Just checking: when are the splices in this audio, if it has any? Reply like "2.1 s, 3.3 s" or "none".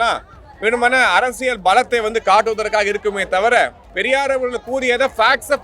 3.9 s